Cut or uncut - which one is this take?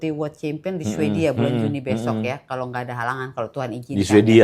uncut